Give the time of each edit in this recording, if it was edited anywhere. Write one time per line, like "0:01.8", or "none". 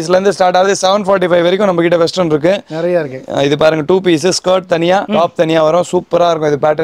none